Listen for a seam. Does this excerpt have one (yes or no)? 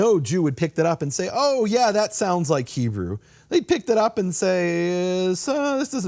no